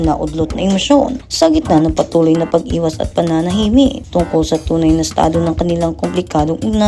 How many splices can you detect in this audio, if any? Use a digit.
2